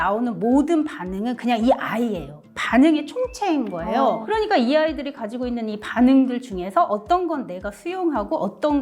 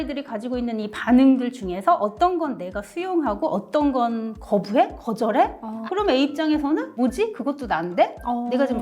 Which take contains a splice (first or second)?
second